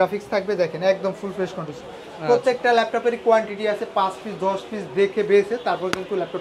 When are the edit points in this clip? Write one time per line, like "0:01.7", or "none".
none